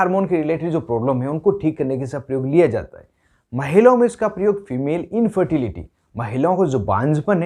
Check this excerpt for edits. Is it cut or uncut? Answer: uncut